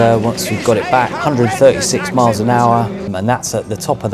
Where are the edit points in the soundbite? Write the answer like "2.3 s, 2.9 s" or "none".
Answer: 3.1 s